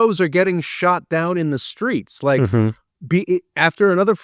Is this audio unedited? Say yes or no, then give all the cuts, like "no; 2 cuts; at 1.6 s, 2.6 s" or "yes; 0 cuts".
yes; 0 cuts